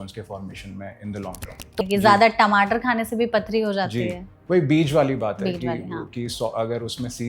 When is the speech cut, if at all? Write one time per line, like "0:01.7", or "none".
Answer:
0:01.8